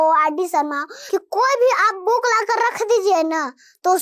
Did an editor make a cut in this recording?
yes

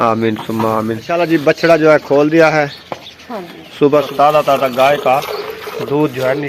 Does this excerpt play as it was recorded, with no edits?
no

